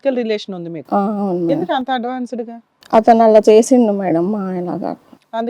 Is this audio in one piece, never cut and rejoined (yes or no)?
yes